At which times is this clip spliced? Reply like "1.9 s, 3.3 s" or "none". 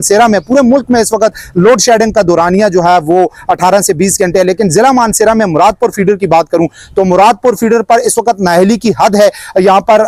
none